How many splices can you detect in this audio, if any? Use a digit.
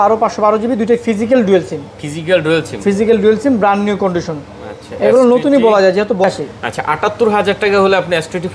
1